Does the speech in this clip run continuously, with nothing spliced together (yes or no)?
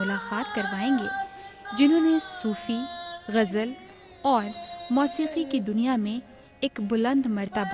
yes